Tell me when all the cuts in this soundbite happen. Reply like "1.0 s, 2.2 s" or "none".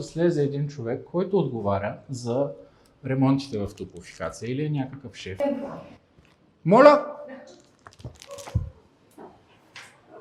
5.4 s